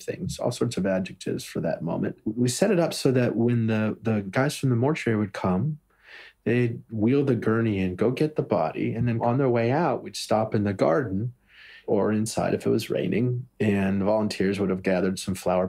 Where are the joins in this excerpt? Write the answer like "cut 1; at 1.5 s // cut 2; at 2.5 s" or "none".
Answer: cut 1; at 2.2 s